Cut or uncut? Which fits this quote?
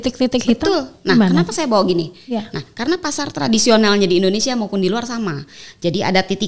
uncut